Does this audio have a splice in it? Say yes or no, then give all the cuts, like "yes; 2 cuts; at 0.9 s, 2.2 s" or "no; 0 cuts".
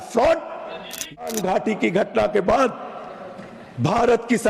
yes; 1 cut; at 1.2 s